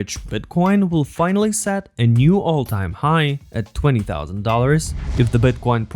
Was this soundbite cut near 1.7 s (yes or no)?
no